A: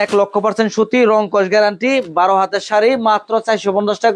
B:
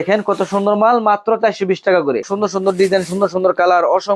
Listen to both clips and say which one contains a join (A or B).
B